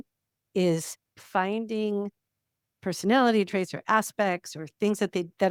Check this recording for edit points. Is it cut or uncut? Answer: uncut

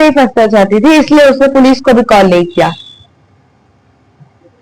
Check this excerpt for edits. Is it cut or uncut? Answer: uncut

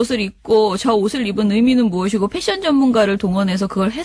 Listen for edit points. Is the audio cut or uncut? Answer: uncut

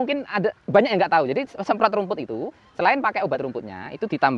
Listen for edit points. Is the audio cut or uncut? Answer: uncut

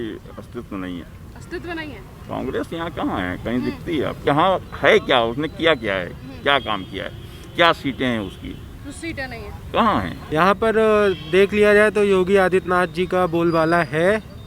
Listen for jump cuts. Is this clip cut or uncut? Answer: cut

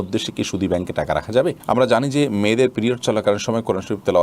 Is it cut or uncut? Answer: cut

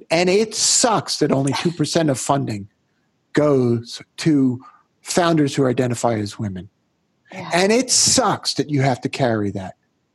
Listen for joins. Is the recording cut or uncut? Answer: uncut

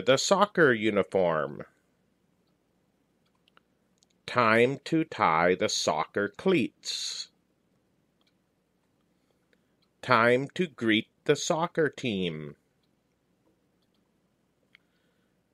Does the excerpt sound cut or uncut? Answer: cut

